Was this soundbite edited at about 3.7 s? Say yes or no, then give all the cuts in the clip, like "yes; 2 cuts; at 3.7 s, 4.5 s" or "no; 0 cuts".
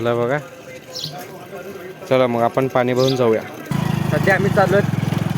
yes; 1 cut; at 3.7 s